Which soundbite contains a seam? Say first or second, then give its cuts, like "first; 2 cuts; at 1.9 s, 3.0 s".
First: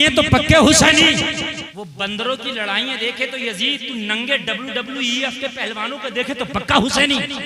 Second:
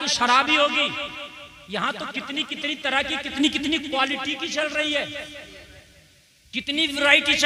first; 1 cut; at 1.7 s